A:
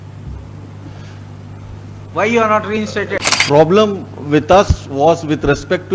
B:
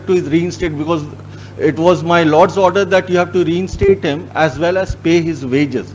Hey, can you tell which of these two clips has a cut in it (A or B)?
A